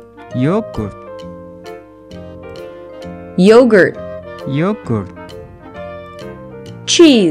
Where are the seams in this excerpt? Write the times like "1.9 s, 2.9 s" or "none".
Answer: 0.9 s, 2.6 s, 5.1 s, 6.4 s